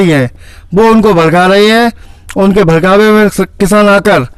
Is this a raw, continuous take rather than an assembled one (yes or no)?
yes